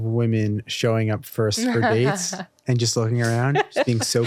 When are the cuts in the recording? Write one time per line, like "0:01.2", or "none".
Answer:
none